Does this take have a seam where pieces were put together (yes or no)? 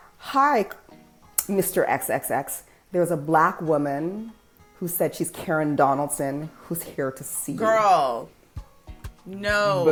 no